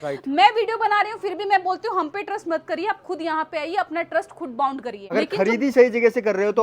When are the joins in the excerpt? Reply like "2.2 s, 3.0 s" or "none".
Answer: 4.9 s